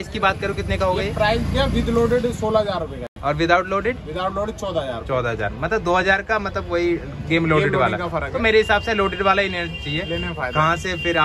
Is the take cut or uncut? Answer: uncut